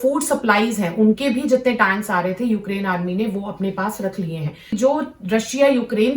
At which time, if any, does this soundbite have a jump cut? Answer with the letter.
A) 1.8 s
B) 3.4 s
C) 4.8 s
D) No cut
C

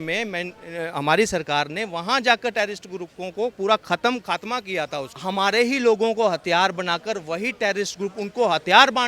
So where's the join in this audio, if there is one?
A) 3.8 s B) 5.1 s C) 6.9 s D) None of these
B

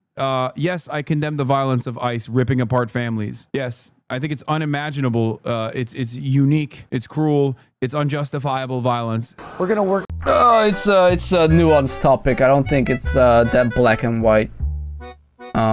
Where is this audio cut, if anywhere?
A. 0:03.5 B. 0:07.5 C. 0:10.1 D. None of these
C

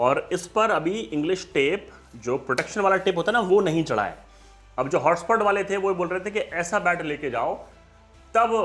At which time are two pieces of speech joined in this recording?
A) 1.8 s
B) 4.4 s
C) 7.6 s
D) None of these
D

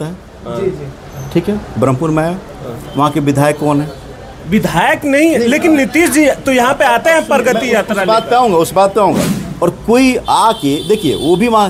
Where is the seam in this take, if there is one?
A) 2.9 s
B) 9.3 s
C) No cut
B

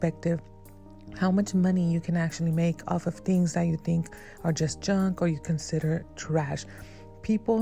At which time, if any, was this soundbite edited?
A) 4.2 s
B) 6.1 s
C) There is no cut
C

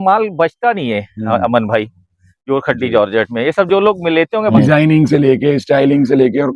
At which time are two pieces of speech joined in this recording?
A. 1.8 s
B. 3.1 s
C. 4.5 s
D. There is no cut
C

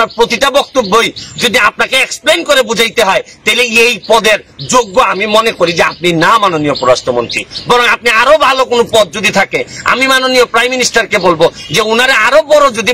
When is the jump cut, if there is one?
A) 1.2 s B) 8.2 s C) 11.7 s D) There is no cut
D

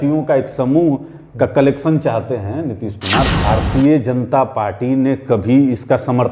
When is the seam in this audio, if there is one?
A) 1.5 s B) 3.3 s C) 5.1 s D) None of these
B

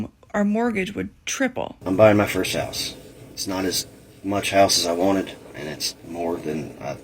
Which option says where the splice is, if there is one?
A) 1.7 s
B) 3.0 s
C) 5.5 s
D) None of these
A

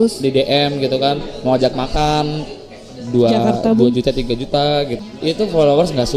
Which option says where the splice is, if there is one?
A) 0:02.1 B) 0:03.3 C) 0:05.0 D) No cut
C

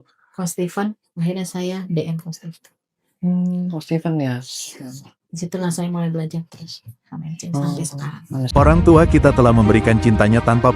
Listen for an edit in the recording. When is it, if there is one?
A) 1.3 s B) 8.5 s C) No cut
B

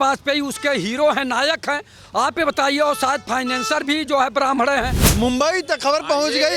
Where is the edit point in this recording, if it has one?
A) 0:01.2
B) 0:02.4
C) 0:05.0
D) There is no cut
C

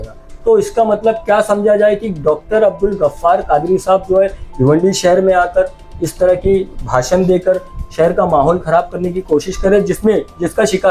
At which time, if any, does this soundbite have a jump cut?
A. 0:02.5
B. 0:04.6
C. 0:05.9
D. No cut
D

